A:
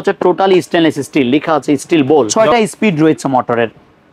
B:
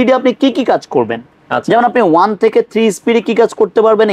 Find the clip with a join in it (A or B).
A